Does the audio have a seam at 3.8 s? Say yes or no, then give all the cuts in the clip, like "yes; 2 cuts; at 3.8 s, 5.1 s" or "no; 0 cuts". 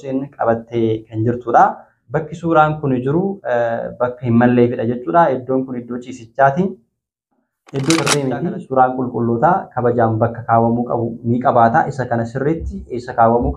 no; 1 cut; at 8.2 s